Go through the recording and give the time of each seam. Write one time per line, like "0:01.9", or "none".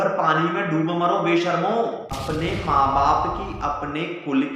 0:02.1